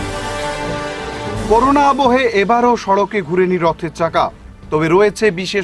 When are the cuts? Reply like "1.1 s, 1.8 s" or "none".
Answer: 1.3 s